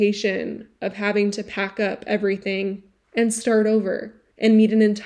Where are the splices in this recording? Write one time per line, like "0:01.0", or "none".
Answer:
none